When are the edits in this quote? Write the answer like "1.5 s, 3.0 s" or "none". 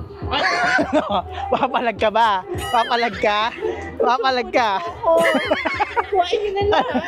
none